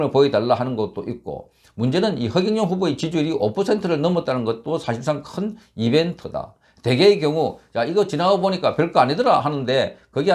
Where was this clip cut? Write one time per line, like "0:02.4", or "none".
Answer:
none